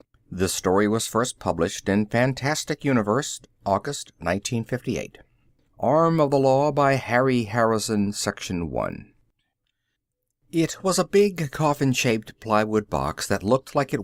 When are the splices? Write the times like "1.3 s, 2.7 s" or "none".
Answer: none